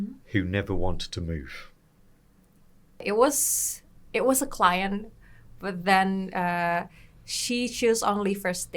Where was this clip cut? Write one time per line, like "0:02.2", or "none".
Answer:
0:03.0